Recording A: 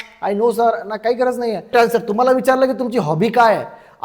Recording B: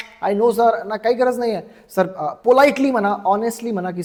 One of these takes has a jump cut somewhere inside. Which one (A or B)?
A